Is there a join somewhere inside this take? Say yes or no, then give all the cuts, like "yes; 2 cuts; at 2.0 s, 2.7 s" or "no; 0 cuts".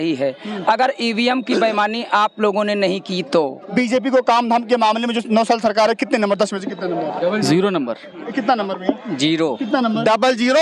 yes; 2 cuts; at 3.7 s, 8.1 s